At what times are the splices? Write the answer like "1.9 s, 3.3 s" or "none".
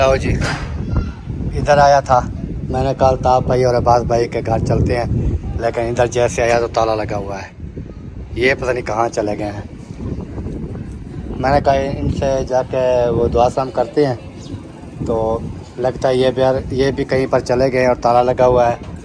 none

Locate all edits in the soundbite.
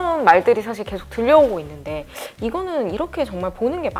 none

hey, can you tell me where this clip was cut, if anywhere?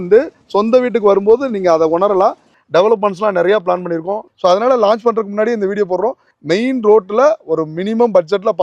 2.6 s, 4.3 s, 6.3 s

